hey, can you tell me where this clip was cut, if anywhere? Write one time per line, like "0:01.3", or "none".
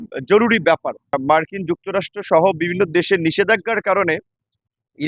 0:01.1